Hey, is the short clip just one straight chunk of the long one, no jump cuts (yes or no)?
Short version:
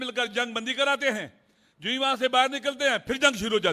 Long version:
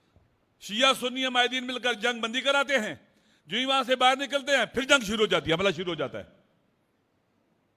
yes